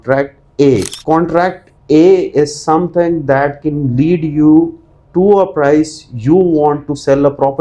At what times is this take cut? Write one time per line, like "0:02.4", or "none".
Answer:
0:00.9